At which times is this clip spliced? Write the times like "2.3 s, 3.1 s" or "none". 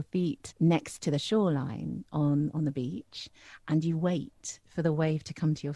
none